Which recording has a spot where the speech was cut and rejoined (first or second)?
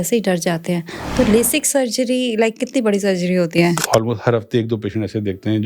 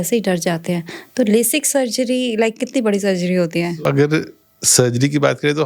first